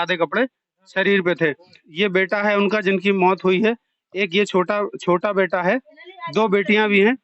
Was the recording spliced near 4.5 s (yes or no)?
no